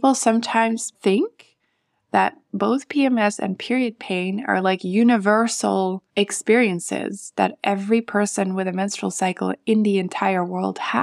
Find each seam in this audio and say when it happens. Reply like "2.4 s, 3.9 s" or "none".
0.9 s, 6.0 s